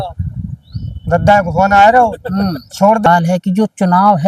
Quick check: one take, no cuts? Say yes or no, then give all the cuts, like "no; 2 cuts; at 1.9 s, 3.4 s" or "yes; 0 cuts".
no; 1 cut; at 3.1 s